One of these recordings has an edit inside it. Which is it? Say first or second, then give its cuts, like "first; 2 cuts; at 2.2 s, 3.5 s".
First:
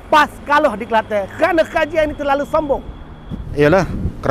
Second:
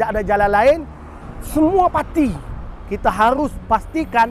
first; 1 cut; at 3.4 s